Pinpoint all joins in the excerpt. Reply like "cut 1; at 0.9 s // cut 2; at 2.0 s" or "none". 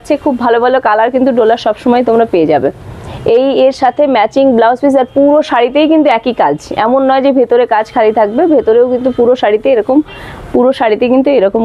none